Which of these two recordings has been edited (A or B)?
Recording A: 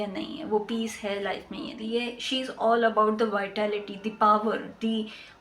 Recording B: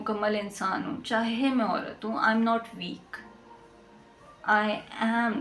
A